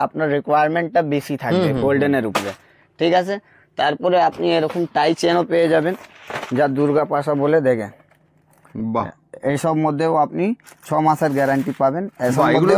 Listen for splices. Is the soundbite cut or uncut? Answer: uncut